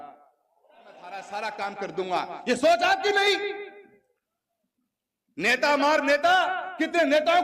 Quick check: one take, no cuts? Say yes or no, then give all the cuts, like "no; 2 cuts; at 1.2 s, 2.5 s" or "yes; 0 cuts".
no; 1 cut; at 1.2 s